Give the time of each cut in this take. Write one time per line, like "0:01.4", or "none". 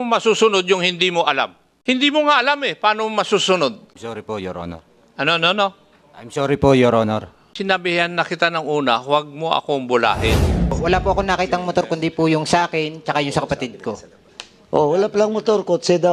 0:01.6
0:03.9
0:07.4
0:10.8